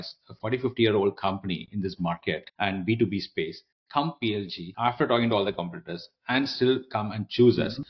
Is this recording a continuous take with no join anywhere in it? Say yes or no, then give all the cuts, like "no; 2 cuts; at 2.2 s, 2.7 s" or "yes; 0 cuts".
no; 2 cuts; at 2.5 s, 4.6 s